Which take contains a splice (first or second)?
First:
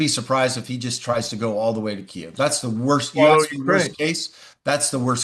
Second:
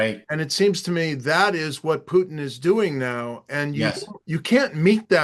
second